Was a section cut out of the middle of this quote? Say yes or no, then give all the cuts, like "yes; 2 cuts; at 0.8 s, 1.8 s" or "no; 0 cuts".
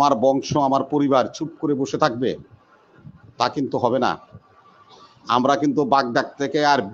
no; 0 cuts